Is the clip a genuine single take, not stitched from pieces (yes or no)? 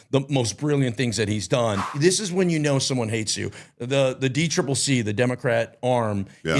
no